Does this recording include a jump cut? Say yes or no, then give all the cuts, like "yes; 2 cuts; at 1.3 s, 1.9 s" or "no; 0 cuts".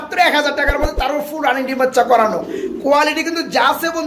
no; 0 cuts